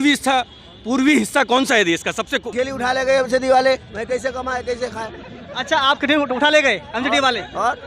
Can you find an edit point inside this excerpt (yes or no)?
yes